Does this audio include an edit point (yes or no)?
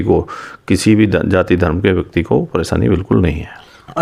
no